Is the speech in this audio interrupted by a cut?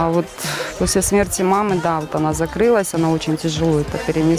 no; 0 cuts

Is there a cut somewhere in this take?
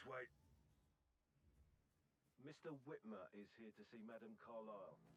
no; 0 cuts

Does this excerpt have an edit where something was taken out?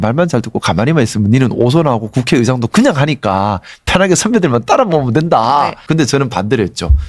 yes; 1 cut; at 5.8 s

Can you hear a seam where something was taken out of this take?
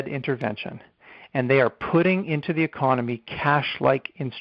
no; 0 cuts

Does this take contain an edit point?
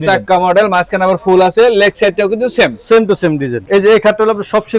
yes; 1 cut; at 3.6 s

